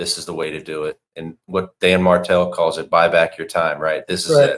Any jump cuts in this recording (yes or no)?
no